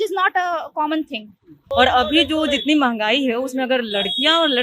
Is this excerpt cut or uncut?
cut